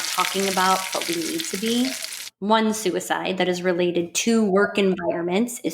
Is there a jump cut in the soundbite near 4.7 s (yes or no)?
no